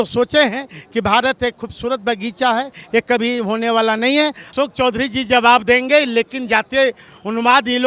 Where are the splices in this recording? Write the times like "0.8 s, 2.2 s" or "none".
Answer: 4.5 s